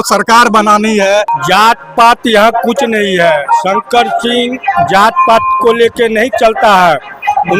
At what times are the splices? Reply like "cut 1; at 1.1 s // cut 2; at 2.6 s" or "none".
cut 1; at 1.3 s